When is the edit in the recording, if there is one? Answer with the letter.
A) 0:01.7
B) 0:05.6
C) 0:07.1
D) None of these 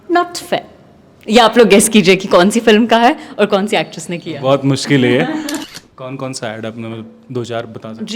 B